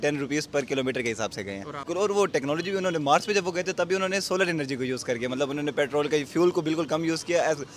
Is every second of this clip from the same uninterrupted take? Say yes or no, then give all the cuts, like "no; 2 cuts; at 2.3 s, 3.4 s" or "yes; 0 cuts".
no; 1 cut; at 1.9 s